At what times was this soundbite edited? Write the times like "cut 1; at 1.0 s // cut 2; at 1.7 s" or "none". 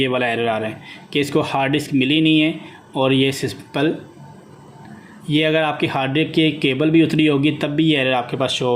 none